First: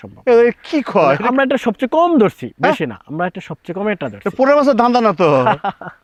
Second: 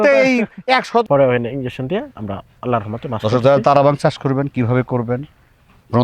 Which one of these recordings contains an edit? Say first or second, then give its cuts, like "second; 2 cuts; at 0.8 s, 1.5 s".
second; 1 cut; at 1.0 s